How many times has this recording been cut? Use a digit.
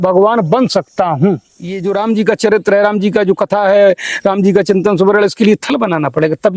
1